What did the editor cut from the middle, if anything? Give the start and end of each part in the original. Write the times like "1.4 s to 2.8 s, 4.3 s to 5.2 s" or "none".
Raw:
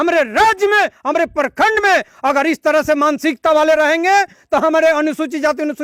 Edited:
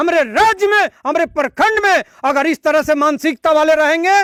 none